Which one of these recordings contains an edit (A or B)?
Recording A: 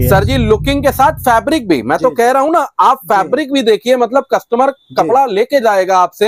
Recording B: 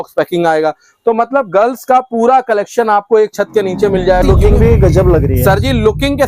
B